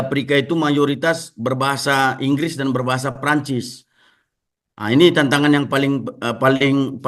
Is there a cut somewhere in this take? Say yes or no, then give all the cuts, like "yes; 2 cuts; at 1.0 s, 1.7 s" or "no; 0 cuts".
no; 0 cuts